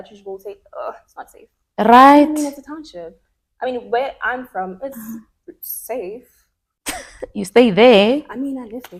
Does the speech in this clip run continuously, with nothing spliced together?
yes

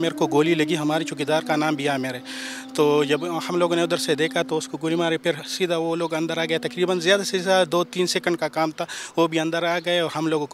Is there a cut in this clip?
no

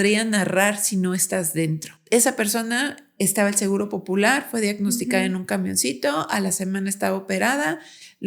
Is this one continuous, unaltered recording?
no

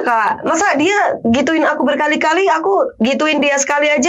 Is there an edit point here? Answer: no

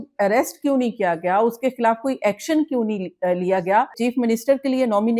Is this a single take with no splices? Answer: no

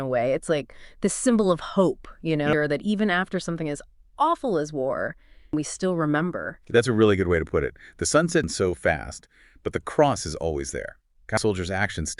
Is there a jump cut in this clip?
yes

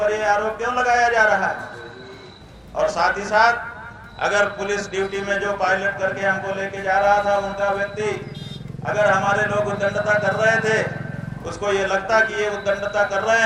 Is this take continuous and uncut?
yes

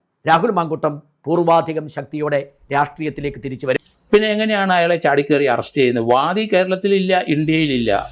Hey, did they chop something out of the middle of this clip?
yes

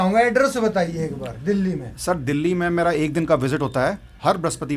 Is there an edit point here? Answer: no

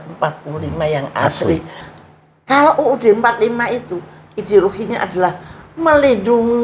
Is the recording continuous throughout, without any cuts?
no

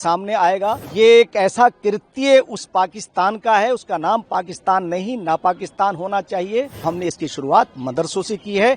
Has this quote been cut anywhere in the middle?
yes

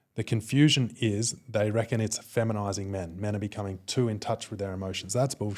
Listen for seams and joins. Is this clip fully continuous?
yes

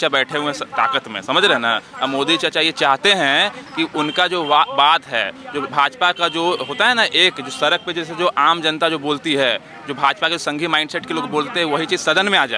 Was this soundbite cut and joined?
no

